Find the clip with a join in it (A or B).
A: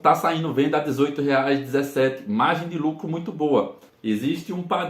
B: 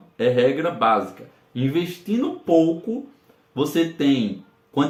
A